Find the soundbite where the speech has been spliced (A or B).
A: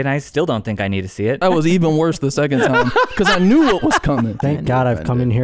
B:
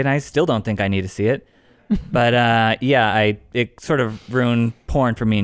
A